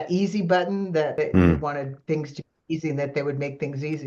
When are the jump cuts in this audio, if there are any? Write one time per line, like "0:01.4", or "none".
0:01.1